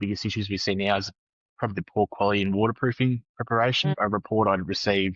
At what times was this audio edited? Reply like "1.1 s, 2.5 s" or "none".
3.8 s

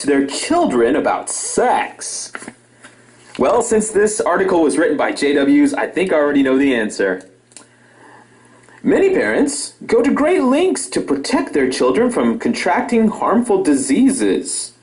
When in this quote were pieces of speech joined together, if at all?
none

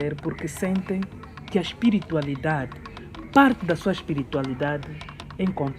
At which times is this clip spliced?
none

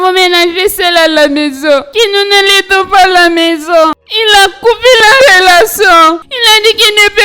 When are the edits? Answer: none

